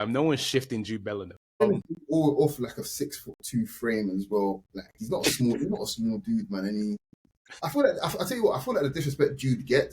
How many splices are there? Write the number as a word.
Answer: one